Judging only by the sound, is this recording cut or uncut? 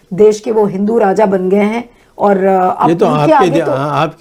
uncut